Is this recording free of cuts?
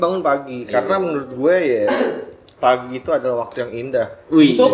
yes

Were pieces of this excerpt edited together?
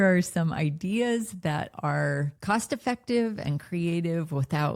no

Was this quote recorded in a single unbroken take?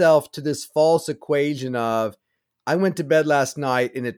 yes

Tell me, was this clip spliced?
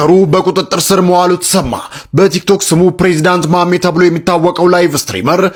no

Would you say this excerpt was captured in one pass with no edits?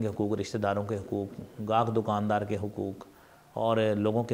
yes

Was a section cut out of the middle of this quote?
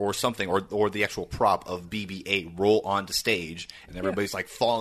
yes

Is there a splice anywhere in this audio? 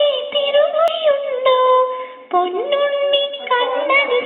yes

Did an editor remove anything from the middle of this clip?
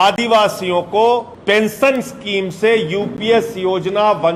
yes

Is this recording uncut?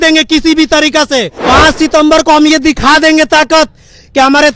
no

